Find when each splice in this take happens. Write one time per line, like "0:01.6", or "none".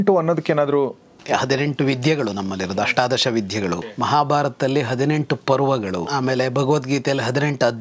0:01.1
0:03.9
0:06.1